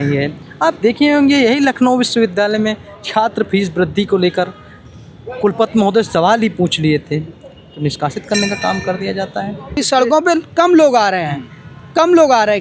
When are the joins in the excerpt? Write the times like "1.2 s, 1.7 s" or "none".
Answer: 9.8 s